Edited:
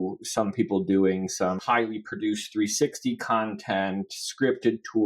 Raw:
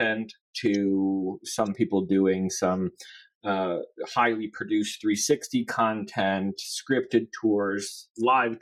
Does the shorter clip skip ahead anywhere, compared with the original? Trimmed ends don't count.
yes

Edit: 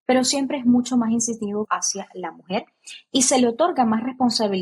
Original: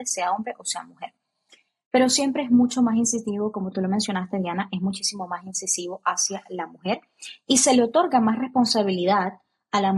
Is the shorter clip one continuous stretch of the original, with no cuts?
no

